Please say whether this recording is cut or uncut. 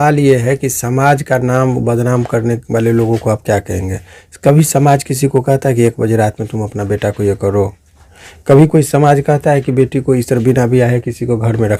uncut